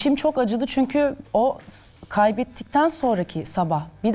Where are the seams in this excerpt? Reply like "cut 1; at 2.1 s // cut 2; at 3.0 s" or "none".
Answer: cut 1; at 1.2 s